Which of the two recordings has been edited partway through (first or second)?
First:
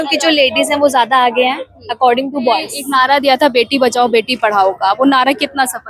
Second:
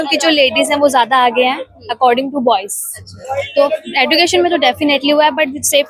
first